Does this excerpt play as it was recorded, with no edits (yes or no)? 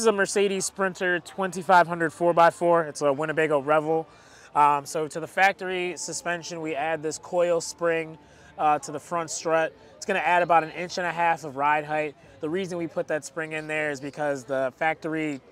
yes